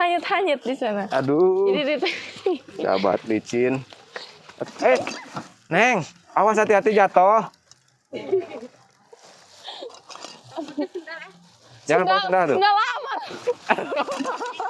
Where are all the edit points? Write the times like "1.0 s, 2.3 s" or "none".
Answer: none